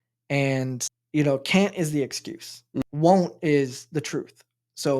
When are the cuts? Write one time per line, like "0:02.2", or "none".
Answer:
0:00.9
0:02.8